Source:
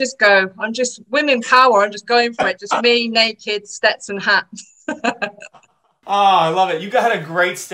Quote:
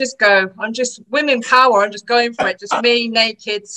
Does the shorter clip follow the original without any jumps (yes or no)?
yes